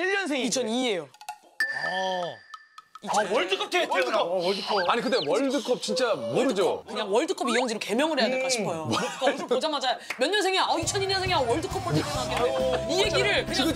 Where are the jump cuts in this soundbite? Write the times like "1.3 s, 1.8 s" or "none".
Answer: 6.9 s

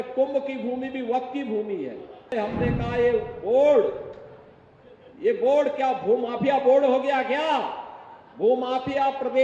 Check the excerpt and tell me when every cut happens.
2.3 s

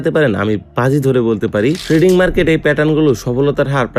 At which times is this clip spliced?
1.8 s

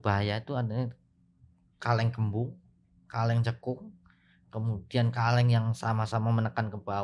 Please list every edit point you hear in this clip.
none

